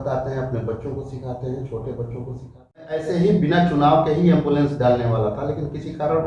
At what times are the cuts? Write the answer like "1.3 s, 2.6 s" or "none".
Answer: 3.0 s